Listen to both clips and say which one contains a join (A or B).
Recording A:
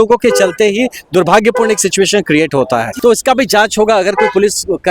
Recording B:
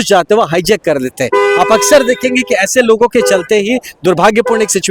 A